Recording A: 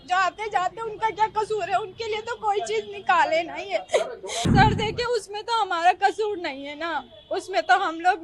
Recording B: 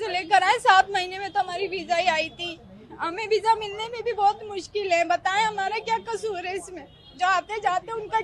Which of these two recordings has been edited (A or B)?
A